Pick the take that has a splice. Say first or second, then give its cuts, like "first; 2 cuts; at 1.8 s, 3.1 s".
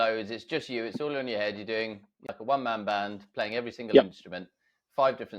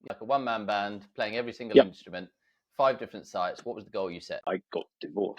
second; 1 cut; at 4.3 s